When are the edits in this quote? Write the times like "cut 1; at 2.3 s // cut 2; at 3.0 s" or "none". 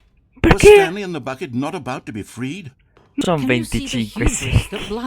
cut 1; at 3.2 s